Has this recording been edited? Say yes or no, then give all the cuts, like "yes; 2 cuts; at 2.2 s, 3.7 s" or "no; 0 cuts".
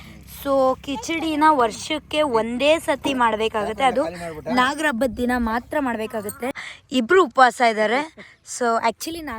yes; 1 cut; at 6.5 s